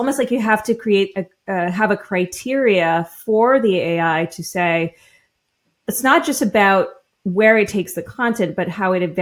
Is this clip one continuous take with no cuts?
yes; 0 cuts

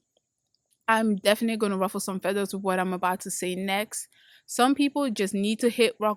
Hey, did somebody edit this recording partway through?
no; 0 cuts

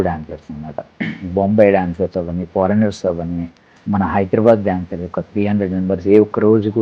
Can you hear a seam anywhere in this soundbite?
no; 0 cuts

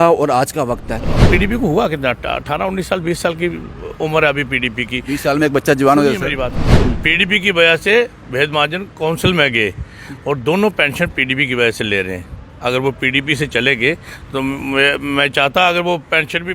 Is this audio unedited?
no; 2 cuts; at 1.1 s, 6.7 s

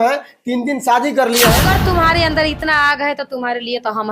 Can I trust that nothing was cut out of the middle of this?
no; 1 cut; at 1.6 s

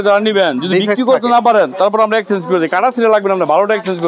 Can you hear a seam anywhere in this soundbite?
no; 0 cuts

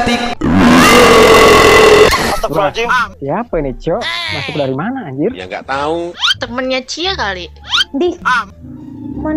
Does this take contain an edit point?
no; 0 cuts

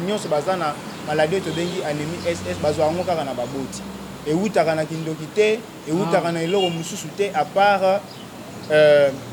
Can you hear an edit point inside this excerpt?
no; 0 cuts

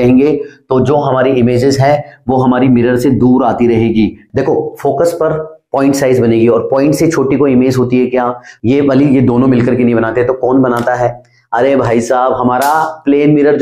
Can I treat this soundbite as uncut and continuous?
no; 2 cuts; at 4.2 s, 8.5 s

